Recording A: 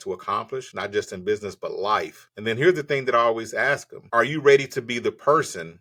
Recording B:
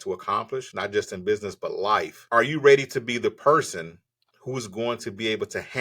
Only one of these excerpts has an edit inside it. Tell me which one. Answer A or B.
B